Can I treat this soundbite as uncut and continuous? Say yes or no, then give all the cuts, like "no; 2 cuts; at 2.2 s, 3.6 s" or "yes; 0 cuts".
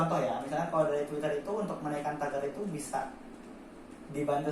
yes; 0 cuts